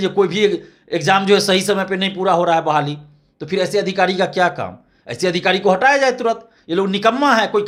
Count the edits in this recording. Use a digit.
0